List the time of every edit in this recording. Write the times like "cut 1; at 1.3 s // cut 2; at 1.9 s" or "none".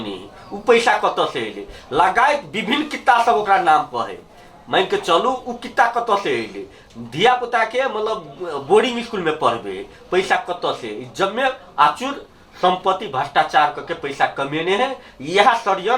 none